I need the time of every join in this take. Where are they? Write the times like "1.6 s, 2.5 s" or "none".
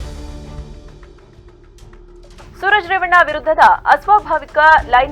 1.8 s